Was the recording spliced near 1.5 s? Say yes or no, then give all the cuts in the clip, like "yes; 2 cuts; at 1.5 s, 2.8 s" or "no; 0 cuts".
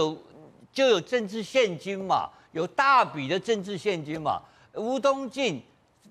no; 0 cuts